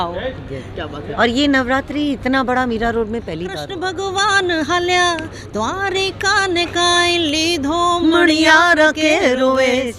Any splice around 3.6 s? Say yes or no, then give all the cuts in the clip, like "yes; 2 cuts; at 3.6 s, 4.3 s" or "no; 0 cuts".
yes; 1 cut; at 3.6 s